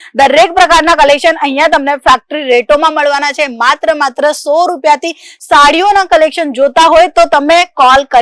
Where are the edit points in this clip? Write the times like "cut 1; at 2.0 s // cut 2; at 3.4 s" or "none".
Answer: none